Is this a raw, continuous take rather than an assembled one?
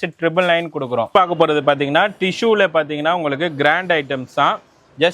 no; 1 cut; at 1.1 s

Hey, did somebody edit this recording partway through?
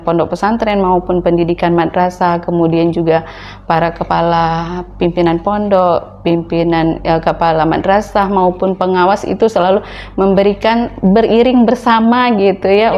no; 0 cuts

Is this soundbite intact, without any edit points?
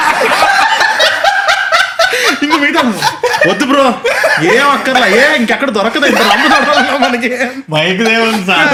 yes; 0 cuts

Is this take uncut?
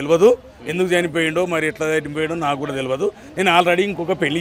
yes; 0 cuts

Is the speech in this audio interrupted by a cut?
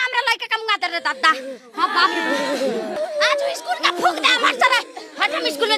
yes; 1 cut; at 2.9 s

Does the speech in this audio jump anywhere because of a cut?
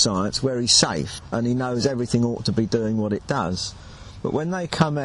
yes; 1 cut; at 1.2 s

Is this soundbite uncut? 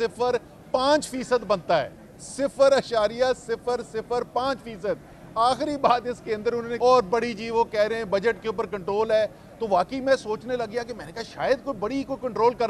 no; 1 cut; at 6.7 s

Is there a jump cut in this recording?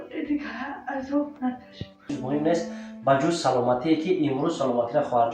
yes; 1 cut; at 2.1 s

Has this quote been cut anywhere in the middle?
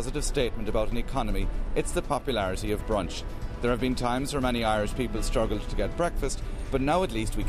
no; 0 cuts

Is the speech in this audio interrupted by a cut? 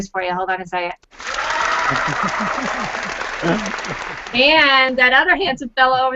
yes; 1 cut; at 4.8 s

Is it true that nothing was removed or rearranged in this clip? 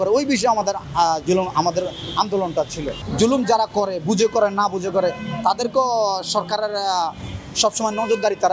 no; 1 cut; at 3.0 s

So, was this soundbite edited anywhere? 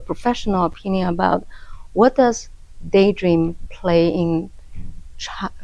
no; 0 cuts

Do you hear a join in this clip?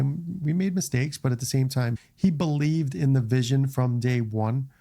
yes; 1 cut; at 2.0 s

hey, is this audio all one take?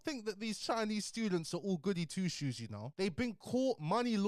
no; 1 cut; at 2.9 s

